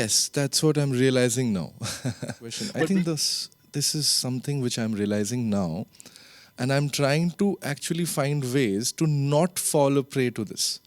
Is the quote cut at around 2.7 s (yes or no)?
yes